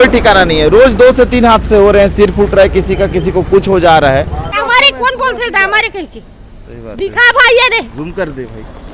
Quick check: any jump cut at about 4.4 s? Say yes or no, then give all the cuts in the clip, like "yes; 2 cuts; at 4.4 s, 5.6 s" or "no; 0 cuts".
yes; 1 cut; at 4.4 s